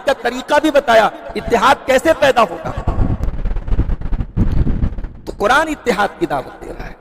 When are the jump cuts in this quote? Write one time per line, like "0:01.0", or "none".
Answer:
0:03.2